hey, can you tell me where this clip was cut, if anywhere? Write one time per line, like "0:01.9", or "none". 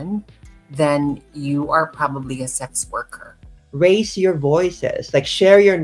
0:03.5